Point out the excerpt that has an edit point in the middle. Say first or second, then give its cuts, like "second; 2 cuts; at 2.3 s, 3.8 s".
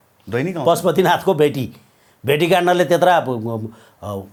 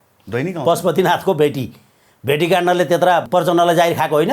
second; 1 cut; at 3.3 s